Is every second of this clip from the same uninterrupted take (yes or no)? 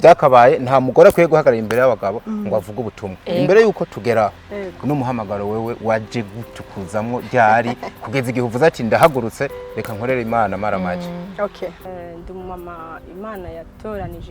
no